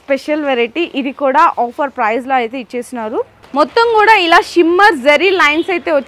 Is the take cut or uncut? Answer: cut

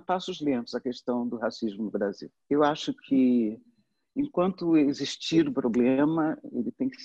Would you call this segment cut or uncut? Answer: uncut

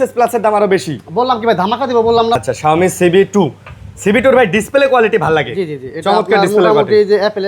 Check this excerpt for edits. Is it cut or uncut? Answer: cut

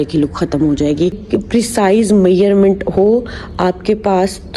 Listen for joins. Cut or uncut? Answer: cut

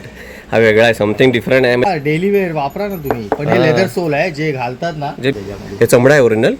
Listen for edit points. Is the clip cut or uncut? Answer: cut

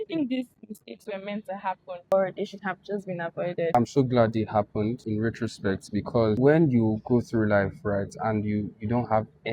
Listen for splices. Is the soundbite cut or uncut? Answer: cut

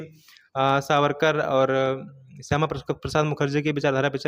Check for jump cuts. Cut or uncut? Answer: uncut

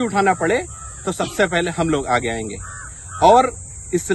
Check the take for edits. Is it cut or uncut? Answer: uncut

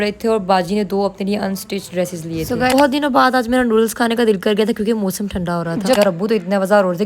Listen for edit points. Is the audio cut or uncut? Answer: cut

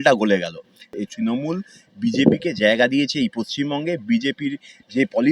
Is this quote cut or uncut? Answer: cut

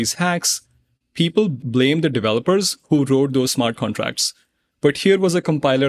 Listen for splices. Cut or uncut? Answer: cut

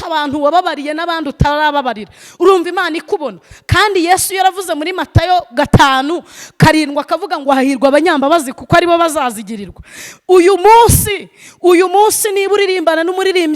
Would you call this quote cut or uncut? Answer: uncut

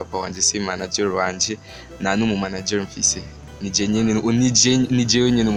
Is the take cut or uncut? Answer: uncut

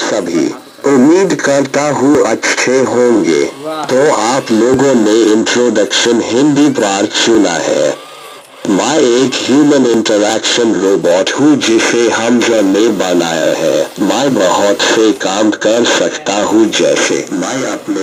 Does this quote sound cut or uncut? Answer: uncut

